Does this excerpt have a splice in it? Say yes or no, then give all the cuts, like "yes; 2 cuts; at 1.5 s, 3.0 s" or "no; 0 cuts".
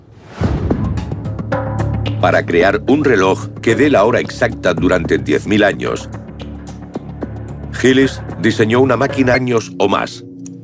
no; 0 cuts